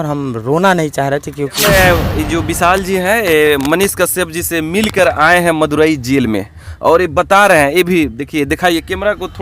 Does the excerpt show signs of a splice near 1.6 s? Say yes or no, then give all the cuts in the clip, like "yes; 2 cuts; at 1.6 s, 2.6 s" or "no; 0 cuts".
yes; 1 cut; at 1.6 s